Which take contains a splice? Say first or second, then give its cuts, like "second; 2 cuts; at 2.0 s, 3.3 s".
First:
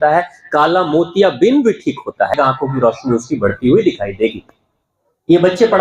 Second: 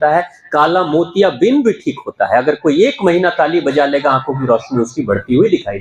first; 1 cut; at 2.3 s